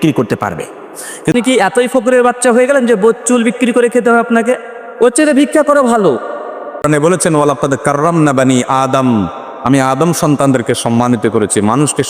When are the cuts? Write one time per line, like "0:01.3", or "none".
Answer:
0:01.3
0:06.8